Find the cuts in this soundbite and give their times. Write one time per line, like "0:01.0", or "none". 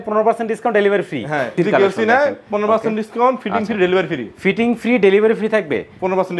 0:01.5

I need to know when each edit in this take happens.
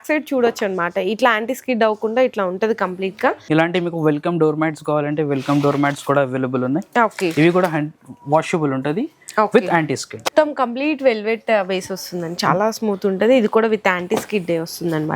0:03.4
0:10.3

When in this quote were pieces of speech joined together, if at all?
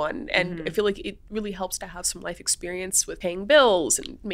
0:03.2

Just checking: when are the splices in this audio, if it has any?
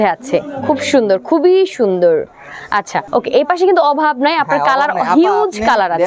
none

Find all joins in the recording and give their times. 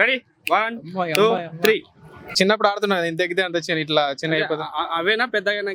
0:02.3

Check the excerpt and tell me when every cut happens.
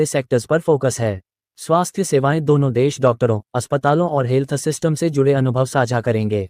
none

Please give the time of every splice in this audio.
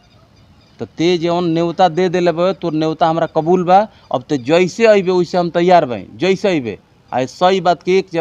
none

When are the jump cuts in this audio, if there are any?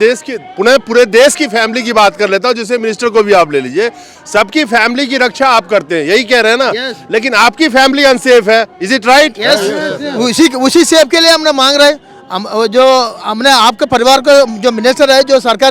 none

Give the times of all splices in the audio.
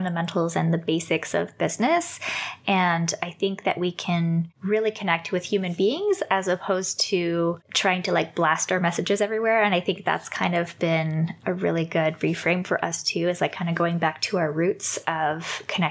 0:04.5
0:07.7
0:11.4

